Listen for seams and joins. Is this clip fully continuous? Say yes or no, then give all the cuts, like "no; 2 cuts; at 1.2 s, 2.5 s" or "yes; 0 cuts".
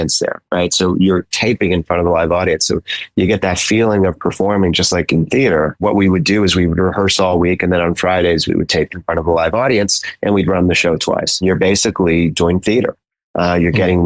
yes; 0 cuts